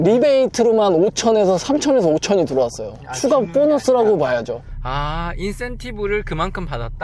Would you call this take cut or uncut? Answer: uncut